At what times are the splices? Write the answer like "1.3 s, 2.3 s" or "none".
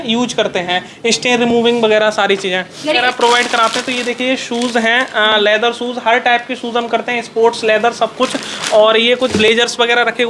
3.0 s